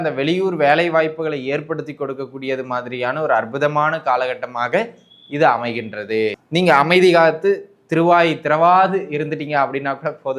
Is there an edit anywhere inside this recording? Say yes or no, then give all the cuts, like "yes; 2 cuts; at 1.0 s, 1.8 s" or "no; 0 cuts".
yes; 1 cut; at 6.4 s